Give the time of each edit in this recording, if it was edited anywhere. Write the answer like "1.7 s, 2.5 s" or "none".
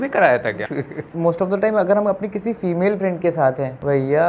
1.1 s